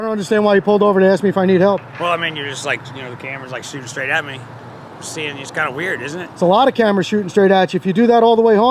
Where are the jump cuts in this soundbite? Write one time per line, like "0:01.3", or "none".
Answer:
none